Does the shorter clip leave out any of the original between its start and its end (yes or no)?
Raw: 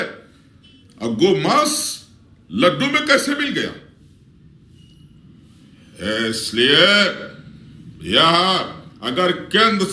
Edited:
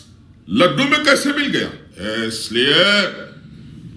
yes